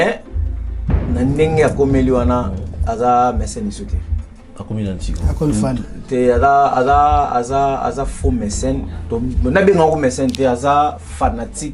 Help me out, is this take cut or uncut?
uncut